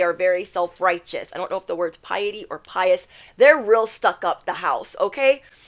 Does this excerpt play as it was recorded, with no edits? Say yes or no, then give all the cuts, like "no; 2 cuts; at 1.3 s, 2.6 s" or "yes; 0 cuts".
yes; 0 cuts